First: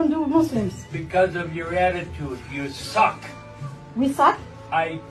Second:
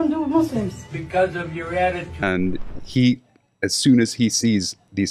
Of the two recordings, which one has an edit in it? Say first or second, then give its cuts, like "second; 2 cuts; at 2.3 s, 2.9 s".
second; 1 cut; at 2.2 s